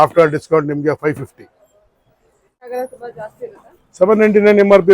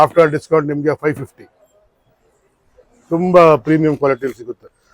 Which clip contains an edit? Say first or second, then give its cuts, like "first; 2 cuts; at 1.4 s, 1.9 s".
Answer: first; 1 cut; at 2.7 s